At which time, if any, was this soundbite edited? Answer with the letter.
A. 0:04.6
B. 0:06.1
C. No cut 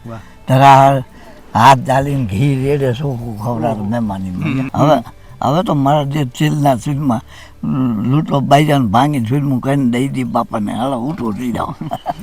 A